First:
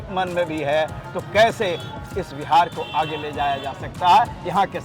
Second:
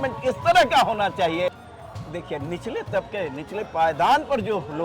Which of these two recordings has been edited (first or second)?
second